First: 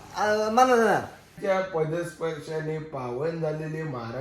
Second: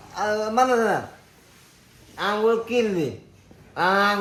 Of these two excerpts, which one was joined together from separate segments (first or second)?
first